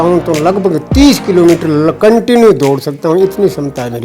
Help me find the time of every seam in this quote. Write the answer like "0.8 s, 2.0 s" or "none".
none